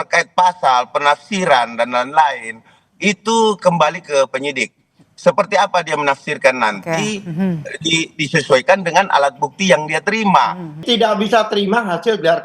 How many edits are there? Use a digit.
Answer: 1